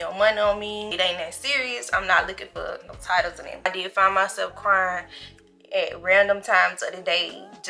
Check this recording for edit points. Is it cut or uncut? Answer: cut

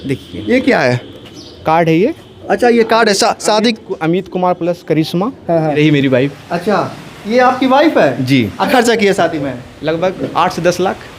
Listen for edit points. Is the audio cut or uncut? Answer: cut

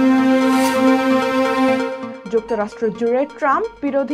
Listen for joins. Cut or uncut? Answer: cut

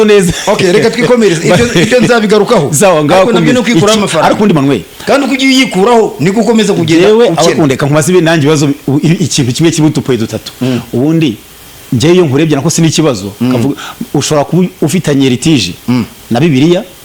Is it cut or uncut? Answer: uncut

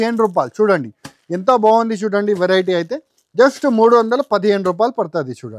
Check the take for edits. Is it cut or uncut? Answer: uncut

